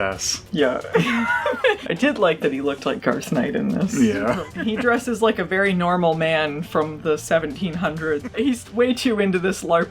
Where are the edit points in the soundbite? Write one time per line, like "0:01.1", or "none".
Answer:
0:01.9
0:04.5
0:08.3

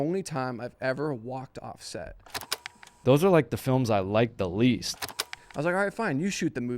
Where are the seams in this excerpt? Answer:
0:02.6
0:05.1

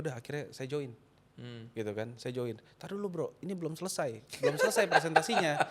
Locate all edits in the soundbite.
none

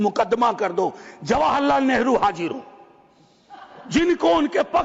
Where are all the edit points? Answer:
none

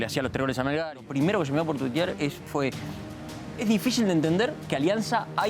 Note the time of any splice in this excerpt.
0:01.0

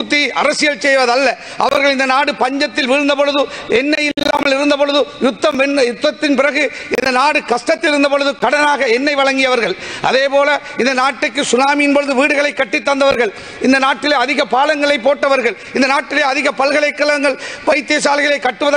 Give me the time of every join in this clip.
none

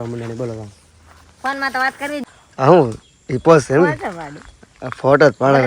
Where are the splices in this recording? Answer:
0:02.2

